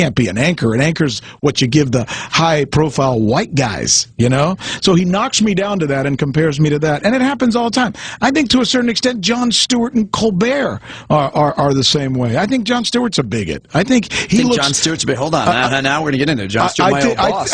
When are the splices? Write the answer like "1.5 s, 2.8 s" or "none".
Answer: 8.0 s